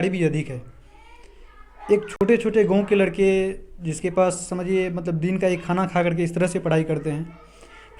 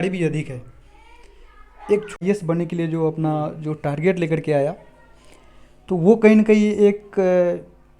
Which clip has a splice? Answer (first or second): second